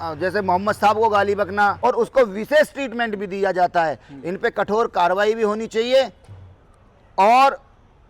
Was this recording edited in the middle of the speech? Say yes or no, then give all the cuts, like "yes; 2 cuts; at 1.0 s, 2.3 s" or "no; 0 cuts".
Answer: yes; 1 cut; at 1.8 s